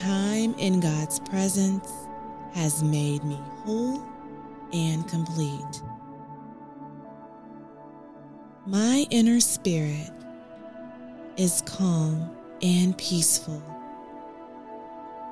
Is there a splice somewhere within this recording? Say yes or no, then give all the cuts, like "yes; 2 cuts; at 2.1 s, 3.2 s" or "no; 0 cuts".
yes; 1 cut; at 5.5 s